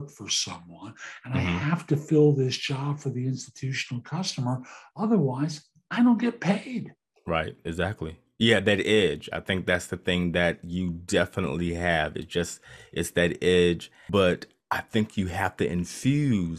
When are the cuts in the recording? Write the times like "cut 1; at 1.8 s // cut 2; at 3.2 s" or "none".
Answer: cut 1; at 13.9 s

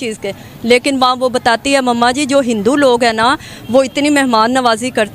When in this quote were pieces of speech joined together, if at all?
none

